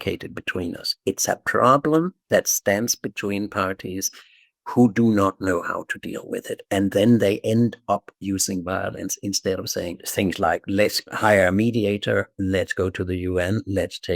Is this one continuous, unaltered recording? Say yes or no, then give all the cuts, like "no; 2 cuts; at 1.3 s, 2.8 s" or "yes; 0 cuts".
no; 2 cuts; at 10.0 s, 11.1 s